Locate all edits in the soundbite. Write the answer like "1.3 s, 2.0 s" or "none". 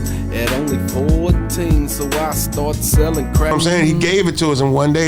3.5 s

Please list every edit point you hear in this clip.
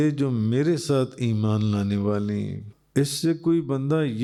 none

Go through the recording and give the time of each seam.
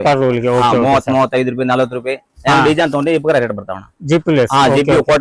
3.9 s

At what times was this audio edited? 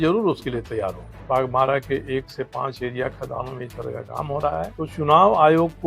1.1 s, 4.8 s

